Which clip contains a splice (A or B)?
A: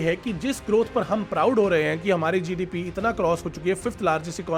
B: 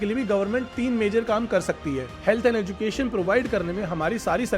B